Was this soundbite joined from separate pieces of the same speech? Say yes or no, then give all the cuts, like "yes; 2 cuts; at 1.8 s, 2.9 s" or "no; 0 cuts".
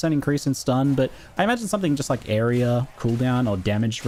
no; 0 cuts